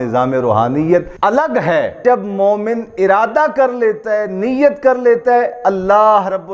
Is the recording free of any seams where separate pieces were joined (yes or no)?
no